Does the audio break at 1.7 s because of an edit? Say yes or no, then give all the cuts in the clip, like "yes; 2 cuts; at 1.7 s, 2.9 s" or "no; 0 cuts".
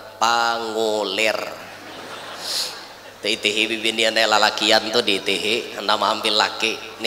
no; 1 cut; at 2.9 s